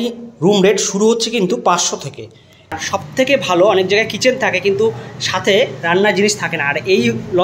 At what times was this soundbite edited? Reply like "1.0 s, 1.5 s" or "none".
2.8 s